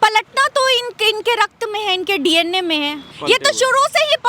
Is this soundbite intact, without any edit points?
no; 1 cut; at 3.0 s

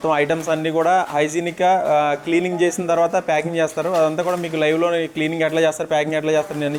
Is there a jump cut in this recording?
no; 0 cuts

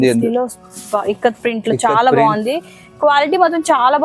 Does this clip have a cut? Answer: no; 0 cuts

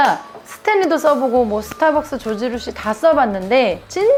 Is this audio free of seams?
yes; 0 cuts

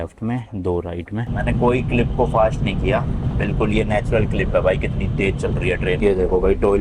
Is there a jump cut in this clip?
yes; 2 cuts; at 1.3 s, 6.0 s

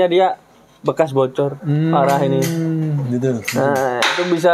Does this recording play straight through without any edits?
yes; 0 cuts

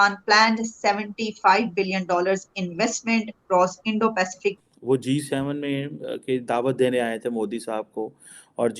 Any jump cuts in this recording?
yes; 1 cut; at 4.6 s

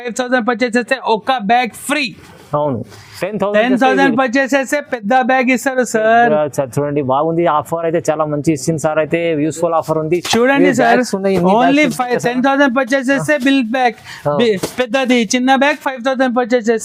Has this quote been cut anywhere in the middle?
no; 0 cuts

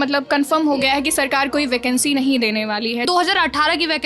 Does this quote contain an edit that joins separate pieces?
yes; 1 cut; at 3.0 s

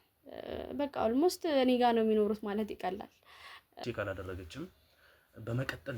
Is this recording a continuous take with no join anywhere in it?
no; 1 cut; at 3.8 s

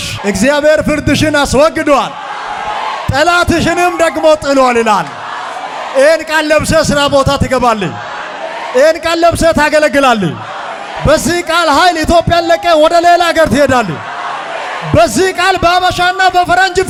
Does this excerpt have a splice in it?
no; 0 cuts

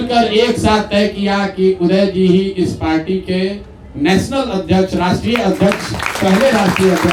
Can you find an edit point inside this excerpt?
no; 0 cuts

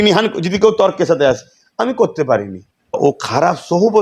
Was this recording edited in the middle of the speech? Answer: yes; 1 cut; at 3.0 s

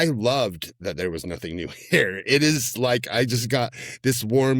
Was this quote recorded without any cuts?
yes; 0 cuts

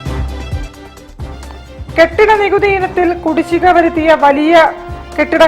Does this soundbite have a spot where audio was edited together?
no; 0 cuts

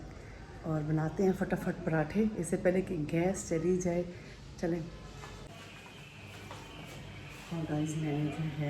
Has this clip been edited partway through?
no; 0 cuts

